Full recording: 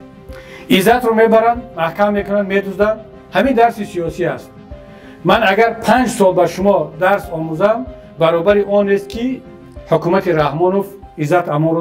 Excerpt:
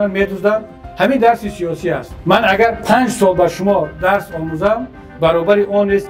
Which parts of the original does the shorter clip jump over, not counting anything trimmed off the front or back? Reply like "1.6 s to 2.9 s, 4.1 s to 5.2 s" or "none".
4.5 s to 5.1 s